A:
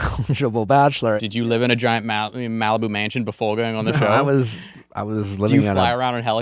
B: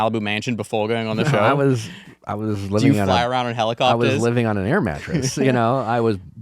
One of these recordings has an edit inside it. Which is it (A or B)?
A